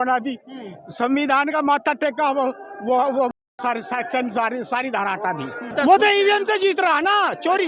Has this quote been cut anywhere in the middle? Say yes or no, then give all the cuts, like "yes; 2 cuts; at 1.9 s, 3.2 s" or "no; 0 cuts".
yes; 1 cut; at 5.7 s